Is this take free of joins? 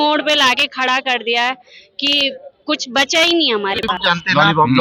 no; 1 cut; at 3.8 s

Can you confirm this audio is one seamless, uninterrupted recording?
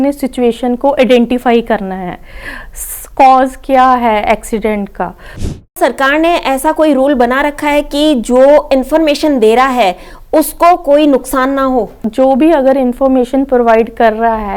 no; 2 cuts; at 5.7 s, 12.0 s

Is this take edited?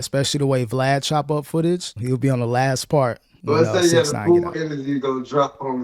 yes; 2 cuts; at 1.9 s, 3.3 s

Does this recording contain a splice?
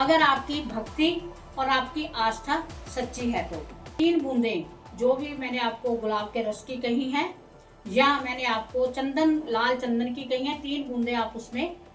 yes; 1 cut; at 3.9 s

